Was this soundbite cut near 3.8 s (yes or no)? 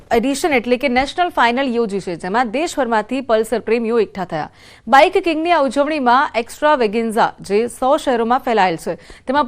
yes